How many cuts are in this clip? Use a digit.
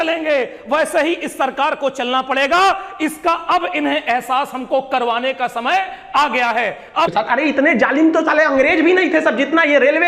1